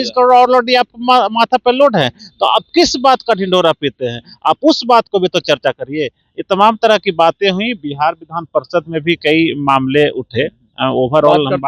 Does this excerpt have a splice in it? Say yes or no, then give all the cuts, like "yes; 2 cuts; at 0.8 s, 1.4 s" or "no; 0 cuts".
no; 0 cuts